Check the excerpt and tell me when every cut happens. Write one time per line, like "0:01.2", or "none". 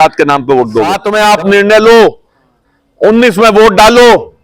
0:01.0